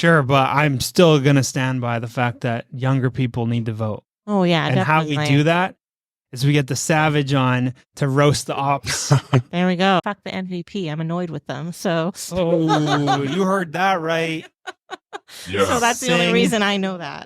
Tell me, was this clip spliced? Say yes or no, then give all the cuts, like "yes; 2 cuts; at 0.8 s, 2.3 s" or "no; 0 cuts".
yes; 1 cut; at 10.1 s